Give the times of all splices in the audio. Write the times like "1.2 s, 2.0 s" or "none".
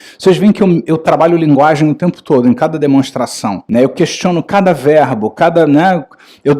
3.6 s